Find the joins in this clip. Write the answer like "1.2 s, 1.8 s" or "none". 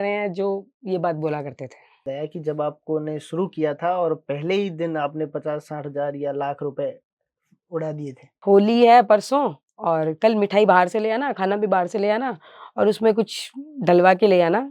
2.1 s, 8.4 s